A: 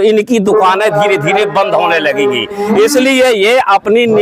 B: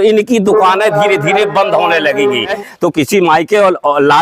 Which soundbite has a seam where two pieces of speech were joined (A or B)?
B